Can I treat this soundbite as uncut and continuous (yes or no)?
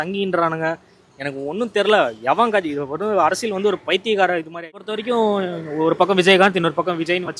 no